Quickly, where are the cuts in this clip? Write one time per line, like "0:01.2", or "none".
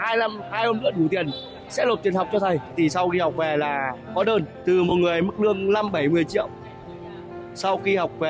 0:02.7
0:04.5